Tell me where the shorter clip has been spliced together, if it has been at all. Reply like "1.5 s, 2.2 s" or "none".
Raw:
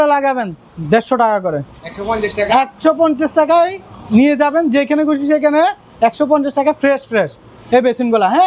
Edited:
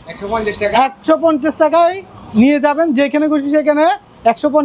none